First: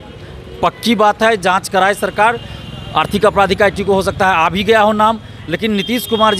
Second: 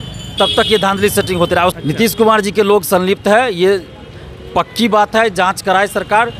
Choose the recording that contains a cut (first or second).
second